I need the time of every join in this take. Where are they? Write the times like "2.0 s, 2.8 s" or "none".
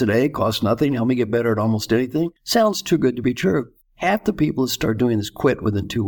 2.4 s, 3.8 s